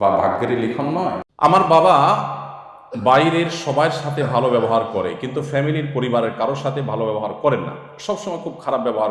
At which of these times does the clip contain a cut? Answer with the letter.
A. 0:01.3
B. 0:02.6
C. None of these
A